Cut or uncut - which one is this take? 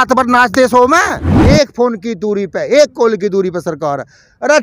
cut